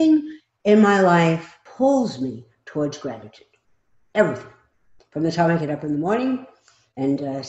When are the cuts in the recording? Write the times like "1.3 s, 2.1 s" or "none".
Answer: 1.6 s